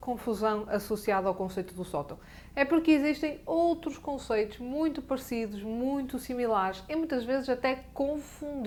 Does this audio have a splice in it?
no; 0 cuts

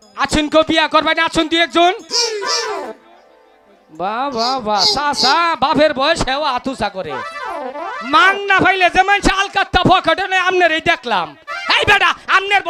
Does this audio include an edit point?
no; 0 cuts

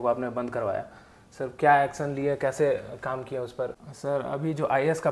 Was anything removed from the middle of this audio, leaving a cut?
yes; 1 cut; at 3.9 s

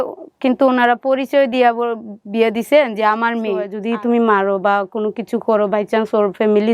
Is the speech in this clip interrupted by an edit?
yes; 1 cut; at 3.8 s

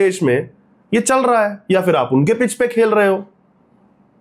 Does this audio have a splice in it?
no; 0 cuts

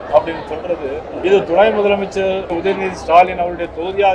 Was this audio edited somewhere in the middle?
yes; 2 cuts; at 1.1 s, 2.5 s

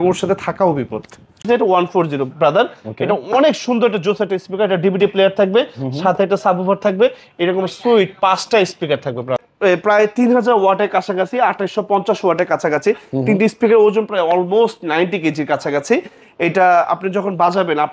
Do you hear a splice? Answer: yes; 2 cuts; at 1.4 s, 9.4 s

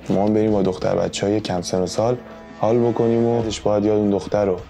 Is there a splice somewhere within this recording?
yes; 1 cut; at 3.5 s

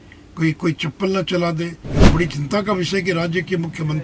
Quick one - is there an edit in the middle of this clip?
yes; 1 cut; at 1.8 s

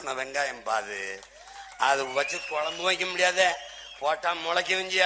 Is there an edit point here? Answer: no; 0 cuts

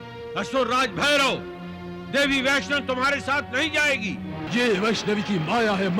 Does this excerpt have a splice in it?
yes; 1 cut; at 4.4 s

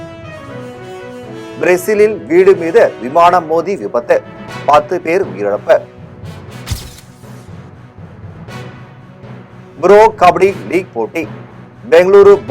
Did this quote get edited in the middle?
yes; 1 cut; at 1.2 s

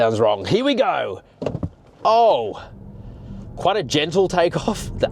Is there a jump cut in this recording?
no; 0 cuts

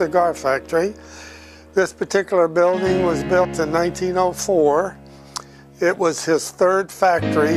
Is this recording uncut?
yes; 0 cuts

